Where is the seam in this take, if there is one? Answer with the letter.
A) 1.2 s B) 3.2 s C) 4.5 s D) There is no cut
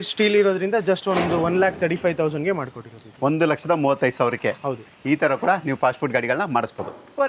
D